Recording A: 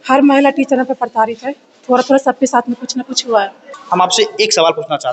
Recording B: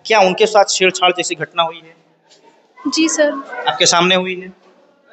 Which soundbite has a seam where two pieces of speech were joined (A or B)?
A